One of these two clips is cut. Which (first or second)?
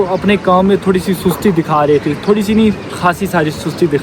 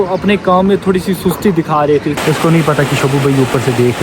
second